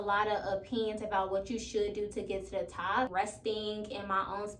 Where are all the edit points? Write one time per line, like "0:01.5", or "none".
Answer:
0:03.1